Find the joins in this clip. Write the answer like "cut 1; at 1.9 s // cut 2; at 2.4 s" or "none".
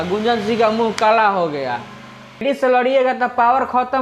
cut 1; at 2.4 s